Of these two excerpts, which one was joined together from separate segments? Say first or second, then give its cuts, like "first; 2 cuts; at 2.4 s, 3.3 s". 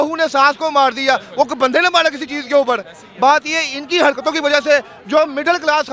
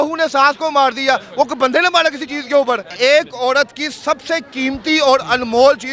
second; 1 cut; at 2.9 s